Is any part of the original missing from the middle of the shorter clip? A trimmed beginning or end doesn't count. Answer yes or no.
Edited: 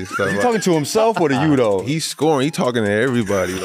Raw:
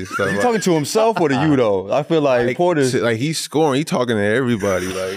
yes